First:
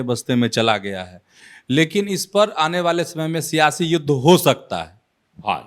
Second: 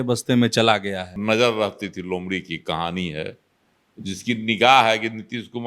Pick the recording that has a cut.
second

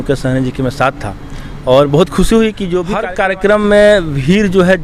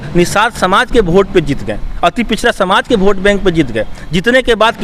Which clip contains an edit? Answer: first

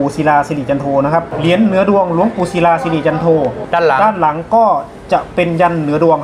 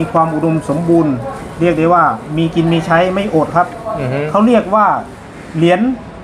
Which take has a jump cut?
first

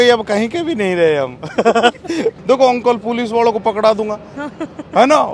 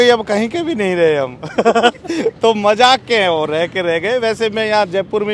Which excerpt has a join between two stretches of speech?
first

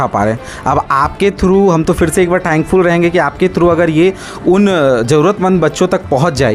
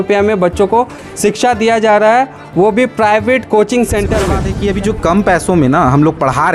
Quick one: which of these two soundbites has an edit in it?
second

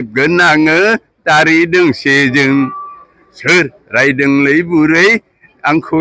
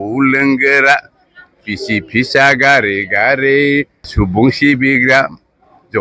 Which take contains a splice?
second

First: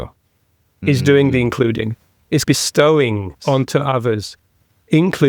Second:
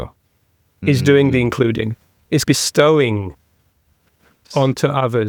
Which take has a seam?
first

